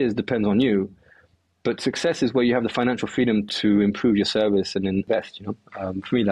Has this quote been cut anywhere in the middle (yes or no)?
yes